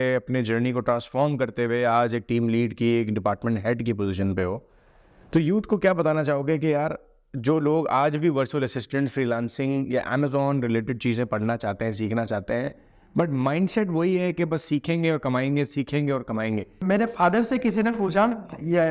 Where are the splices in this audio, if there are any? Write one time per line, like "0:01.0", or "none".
0:16.8